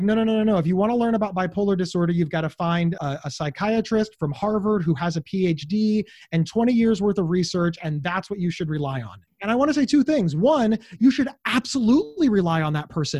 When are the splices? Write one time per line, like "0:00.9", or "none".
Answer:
0:09.3